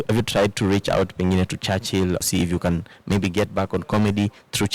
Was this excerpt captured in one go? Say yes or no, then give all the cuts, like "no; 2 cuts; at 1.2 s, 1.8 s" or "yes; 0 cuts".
no; 1 cut; at 2.2 s